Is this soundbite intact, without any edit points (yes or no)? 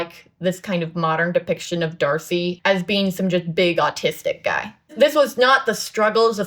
no